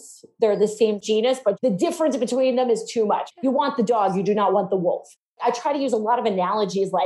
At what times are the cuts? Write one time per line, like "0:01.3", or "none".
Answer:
0:03.3
0:05.3